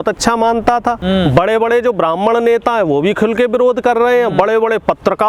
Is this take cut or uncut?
cut